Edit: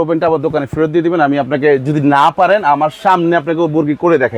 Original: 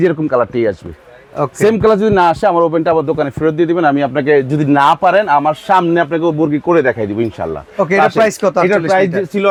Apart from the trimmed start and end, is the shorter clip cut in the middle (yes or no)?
no